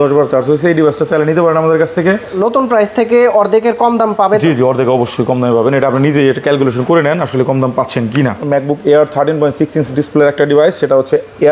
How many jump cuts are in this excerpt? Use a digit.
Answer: 2